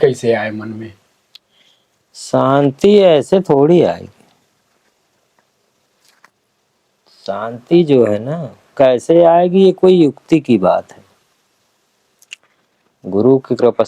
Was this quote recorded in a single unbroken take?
yes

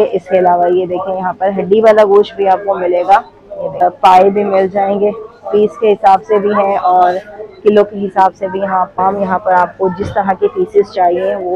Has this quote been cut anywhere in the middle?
yes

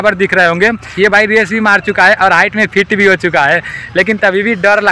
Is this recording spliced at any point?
no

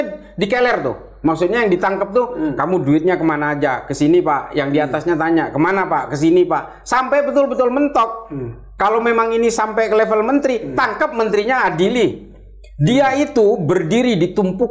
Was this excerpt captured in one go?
yes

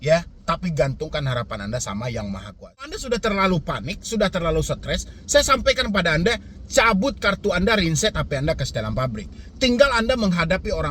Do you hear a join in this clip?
yes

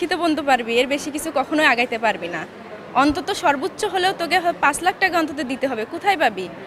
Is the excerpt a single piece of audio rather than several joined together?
yes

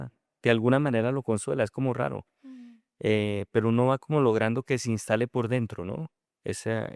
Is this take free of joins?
yes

